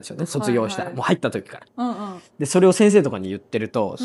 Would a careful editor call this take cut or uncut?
uncut